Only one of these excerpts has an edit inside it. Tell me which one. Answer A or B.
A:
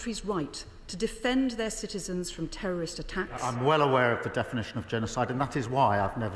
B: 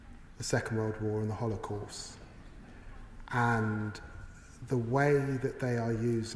A